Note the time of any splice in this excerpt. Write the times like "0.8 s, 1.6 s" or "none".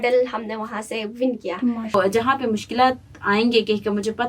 1.9 s